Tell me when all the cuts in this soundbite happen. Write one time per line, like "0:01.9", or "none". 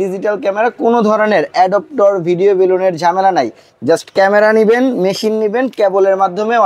none